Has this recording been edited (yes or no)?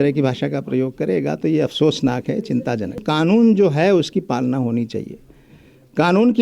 yes